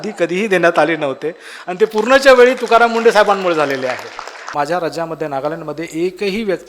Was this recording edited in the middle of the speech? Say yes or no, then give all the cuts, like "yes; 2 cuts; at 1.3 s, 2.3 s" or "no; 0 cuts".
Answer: yes; 1 cut; at 4.4 s